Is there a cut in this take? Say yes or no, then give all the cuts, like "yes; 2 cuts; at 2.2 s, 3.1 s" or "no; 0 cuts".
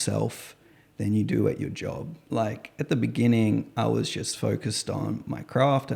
no; 0 cuts